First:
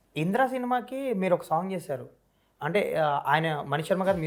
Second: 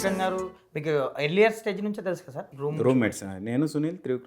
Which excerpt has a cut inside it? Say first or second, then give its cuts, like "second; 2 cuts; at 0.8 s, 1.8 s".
second; 1 cut; at 2.5 s